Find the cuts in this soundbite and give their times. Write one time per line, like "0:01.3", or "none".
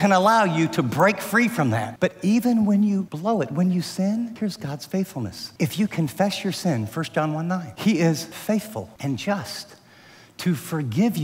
0:01.9
0:03.1
0:04.3
0:05.4
0:07.7
0:08.3

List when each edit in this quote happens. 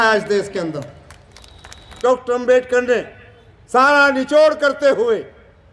0:02.0

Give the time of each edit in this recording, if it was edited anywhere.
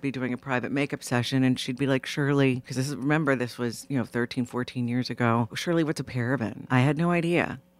0:02.7
0:05.6
0:06.6

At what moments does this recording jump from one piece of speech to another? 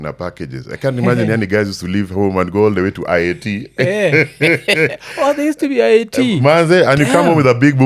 none

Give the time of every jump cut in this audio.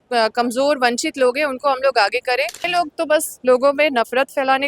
0:02.7

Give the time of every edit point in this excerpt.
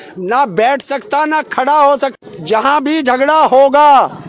0:02.3

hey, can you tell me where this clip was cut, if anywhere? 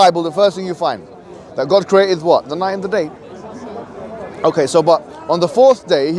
none

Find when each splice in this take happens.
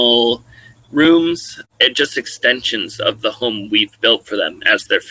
0:01.5

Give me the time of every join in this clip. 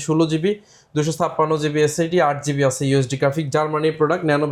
none

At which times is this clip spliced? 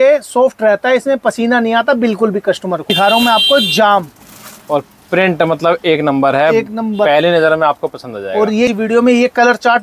0:02.9
0:08.7

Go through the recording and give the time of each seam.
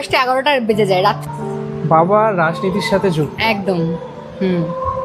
0:01.2

